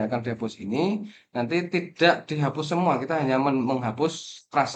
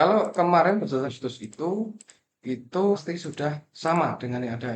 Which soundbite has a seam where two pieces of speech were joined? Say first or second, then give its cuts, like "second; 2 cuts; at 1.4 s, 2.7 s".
second; 2 cuts; at 1.0 s, 3.0 s